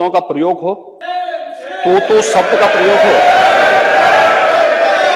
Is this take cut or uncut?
cut